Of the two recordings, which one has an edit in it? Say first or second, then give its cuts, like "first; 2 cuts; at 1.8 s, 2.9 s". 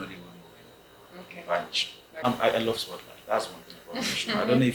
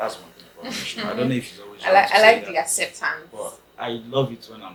first; 1 cut; at 2.2 s